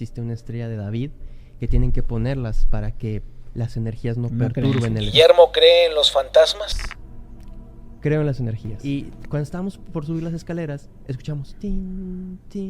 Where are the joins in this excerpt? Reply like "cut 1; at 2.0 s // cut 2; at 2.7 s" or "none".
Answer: cut 1; at 5.0 s // cut 2; at 8.7 s

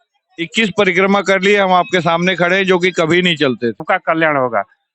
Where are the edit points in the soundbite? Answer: cut 1; at 3.8 s

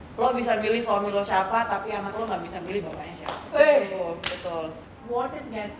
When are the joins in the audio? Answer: cut 1; at 4.9 s

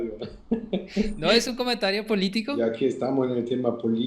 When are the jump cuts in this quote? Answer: cut 1; at 2.6 s

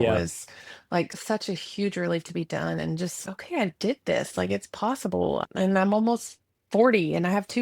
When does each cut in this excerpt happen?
cut 1; at 1.2 s // cut 2; at 3.2 s // cut 3; at 5.4 s

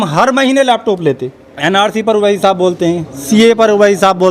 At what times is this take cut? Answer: cut 1; at 1.5 s

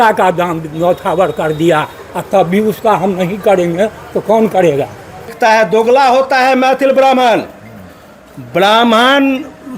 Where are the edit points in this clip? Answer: cut 1; at 5.3 s

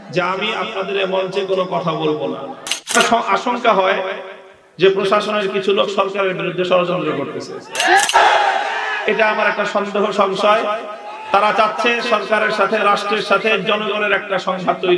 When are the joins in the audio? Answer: cut 1; at 2.9 s // cut 2; at 8.1 s

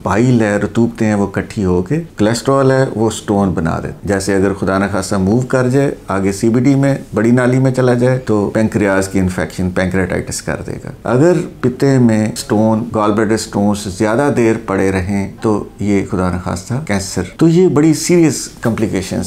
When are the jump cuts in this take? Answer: cut 1; at 2.1 s // cut 2; at 3.9 s // cut 3; at 11.0 s // cut 4; at 17.3 s

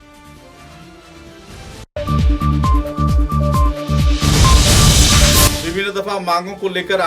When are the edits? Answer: cut 1; at 1.9 s // cut 2; at 5.5 s

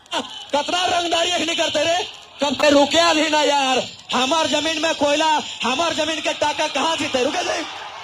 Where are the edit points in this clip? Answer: cut 1; at 2.6 s

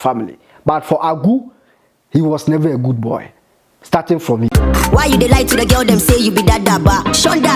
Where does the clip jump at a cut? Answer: cut 1; at 4.5 s

